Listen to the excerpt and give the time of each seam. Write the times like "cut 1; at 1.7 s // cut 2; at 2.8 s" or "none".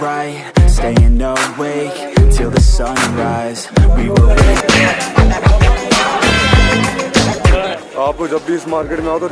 cut 1; at 4.6 s